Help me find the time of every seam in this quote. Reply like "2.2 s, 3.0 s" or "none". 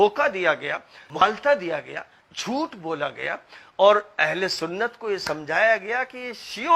1.2 s

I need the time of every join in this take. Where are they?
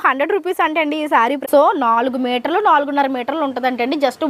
1.4 s

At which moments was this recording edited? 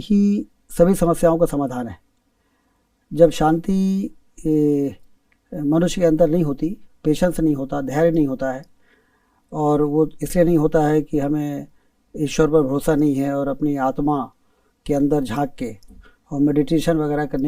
none

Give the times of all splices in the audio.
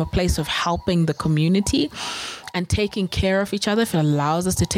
none

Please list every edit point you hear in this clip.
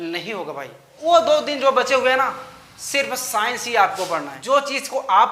0.9 s, 4.3 s

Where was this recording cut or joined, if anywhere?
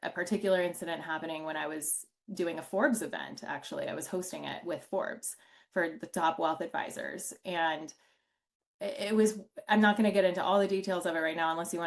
none

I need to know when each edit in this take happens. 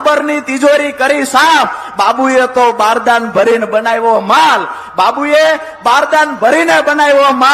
none

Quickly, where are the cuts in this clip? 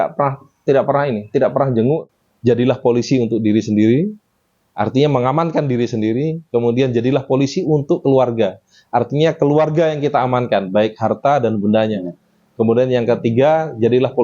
2.1 s

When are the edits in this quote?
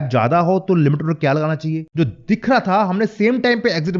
1.8 s

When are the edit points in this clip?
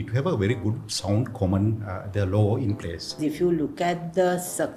3.2 s

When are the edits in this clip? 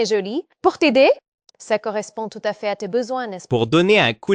3.4 s

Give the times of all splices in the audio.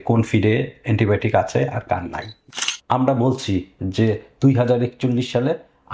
2.3 s

